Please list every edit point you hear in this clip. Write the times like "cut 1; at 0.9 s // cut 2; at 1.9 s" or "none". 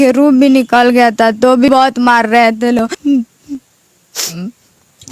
cut 1; at 1.7 s // cut 2; at 2.9 s

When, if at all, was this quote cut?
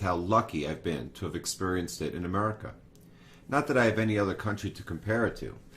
cut 1; at 2.5 s

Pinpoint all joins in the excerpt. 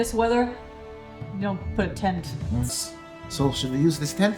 cut 1; at 2.7 s

